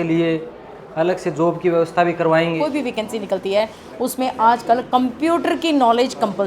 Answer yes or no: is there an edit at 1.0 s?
no